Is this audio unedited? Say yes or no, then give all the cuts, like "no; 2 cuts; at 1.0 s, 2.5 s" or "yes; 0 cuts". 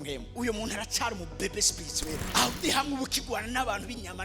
yes; 0 cuts